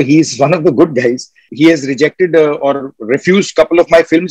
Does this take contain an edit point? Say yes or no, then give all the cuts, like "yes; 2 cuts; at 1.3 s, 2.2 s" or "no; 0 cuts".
yes; 1 cut; at 1.5 s